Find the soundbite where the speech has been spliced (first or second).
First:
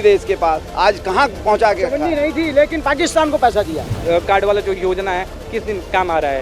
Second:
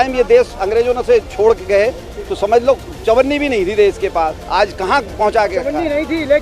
first